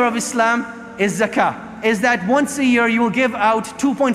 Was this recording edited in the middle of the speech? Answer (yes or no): yes